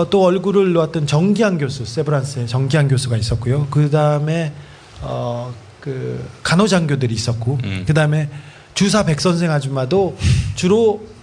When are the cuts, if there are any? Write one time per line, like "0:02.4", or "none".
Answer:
0:05.9